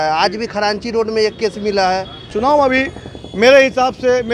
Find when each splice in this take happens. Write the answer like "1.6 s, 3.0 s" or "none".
2.3 s